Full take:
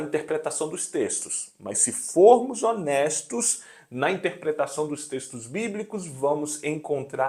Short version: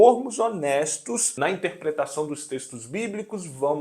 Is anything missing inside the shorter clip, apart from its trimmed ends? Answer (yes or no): yes